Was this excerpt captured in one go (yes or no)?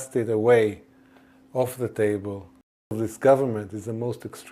no